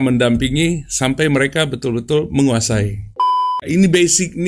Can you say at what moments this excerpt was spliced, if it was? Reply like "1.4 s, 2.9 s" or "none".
3.5 s